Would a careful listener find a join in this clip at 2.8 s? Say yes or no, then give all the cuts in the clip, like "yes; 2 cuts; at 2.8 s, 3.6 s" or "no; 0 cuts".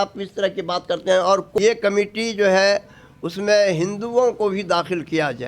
no; 1 cut; at 1.6 s